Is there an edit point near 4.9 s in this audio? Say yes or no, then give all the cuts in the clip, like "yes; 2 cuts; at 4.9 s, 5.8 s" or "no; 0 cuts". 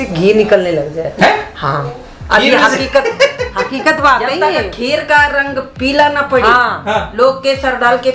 no; 0 cuts